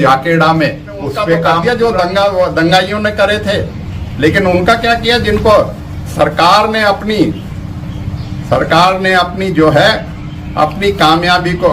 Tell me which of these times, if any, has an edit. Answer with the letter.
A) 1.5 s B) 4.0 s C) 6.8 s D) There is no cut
A